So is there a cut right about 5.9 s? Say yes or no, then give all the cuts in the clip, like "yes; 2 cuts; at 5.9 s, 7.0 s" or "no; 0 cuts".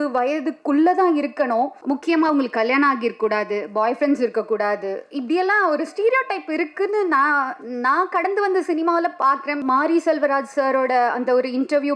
no; 2 cuts; at 1.8 s, 9.6 s